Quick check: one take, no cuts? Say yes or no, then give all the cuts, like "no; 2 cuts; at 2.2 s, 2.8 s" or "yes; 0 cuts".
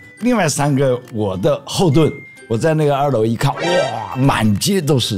no; 1 cut; at 4.1 s